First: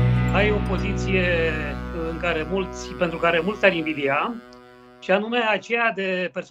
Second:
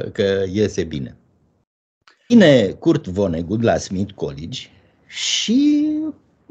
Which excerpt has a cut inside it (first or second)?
second